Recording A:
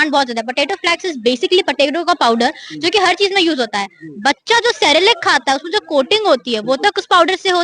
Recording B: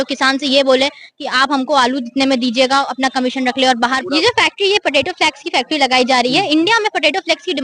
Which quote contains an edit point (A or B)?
B